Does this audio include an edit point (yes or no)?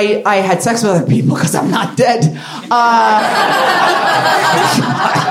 no